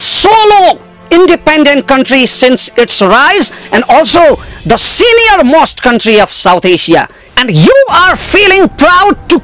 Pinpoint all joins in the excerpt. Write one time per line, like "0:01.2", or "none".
0:07.2